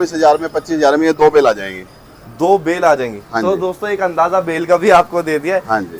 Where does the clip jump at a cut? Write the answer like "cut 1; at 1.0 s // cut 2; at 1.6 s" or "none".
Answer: none